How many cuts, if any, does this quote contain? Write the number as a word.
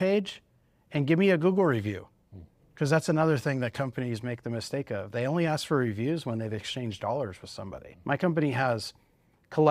one